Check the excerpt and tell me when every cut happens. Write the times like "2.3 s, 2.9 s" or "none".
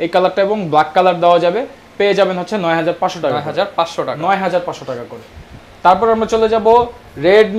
none